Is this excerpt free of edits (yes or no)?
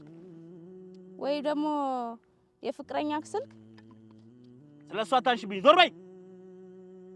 no